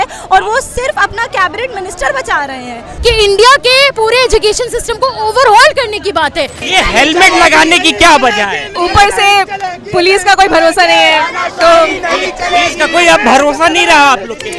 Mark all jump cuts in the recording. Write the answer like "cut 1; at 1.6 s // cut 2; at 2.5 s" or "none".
cut 1; at 2.9 s // cut 2; at 6.6 s // cut 3; at 8.7 s